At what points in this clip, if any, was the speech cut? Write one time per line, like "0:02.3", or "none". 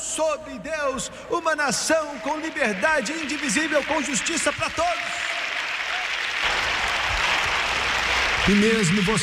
0:06.4

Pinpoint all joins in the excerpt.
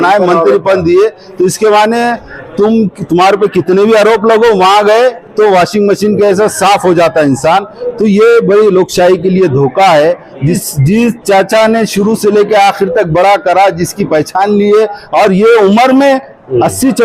0:10.6

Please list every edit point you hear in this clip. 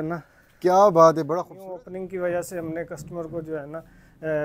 0:01.5

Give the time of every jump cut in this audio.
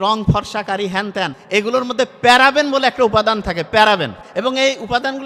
0:01.4
0:04.2

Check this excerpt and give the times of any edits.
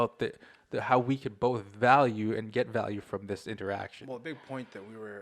none

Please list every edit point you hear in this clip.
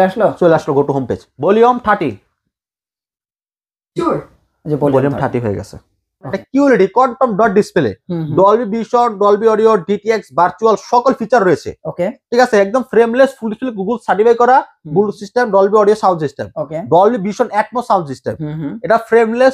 0:01.2
0:06.1

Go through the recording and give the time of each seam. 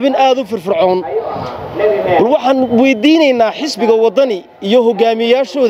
none

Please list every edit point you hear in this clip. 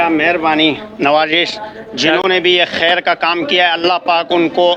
none

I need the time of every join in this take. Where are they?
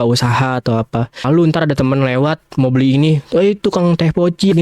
0:01.2

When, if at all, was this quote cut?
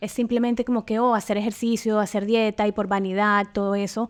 none

